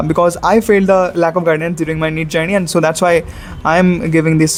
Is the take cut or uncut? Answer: uncut